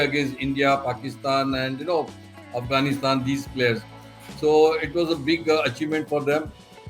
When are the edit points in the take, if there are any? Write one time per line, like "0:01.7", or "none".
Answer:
none